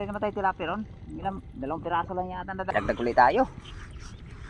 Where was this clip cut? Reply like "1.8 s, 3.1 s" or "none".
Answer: 2.7 s